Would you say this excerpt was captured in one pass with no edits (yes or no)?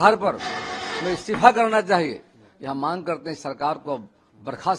yes